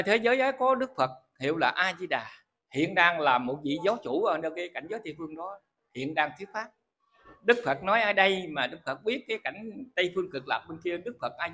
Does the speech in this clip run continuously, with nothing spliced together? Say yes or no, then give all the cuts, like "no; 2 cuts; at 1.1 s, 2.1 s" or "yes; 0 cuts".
yes; 0 cuts